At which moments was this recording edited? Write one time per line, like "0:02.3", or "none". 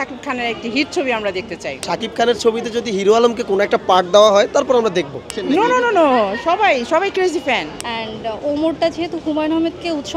0:01.7
0:05.2
0:07.8